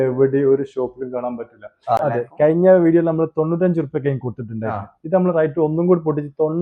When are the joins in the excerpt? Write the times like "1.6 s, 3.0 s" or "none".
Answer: 2.0 s

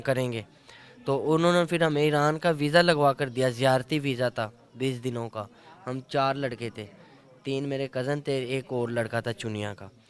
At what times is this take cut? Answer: none

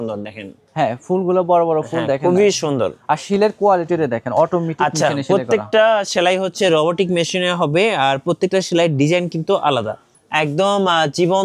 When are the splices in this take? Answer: 10.1 s

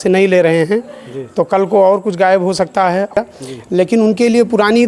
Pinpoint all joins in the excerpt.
3.2 s

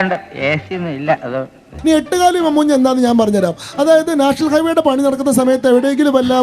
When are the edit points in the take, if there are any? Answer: 1.7 s

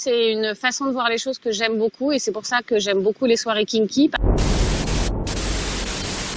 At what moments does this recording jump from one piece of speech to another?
4.2 s

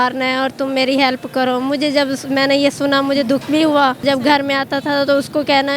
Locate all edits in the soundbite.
4.0 s

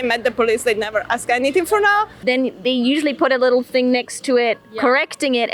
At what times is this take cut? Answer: 2.1 s

